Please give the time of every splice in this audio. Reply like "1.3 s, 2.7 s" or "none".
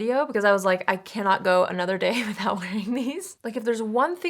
3.3 s